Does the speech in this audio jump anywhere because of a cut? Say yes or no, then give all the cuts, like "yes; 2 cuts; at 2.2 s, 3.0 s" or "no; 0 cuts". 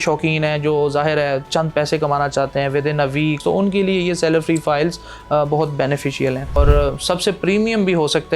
yes; 2 cuts; at 3.4 s, 6.6 s